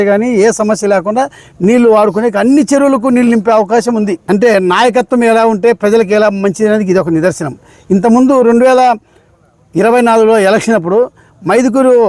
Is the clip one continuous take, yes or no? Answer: no